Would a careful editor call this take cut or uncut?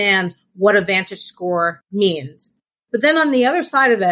cut